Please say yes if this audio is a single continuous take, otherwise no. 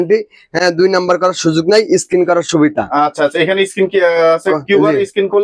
yes